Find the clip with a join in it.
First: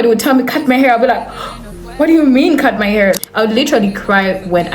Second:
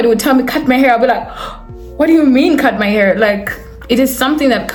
first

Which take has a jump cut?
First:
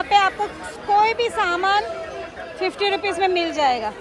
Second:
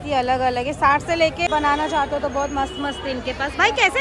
second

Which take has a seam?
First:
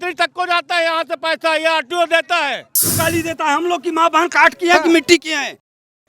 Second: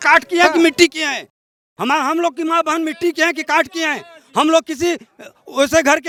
first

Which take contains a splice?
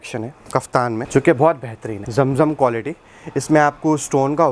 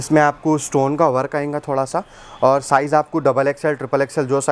first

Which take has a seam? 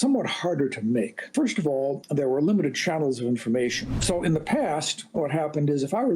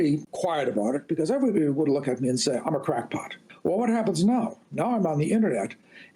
first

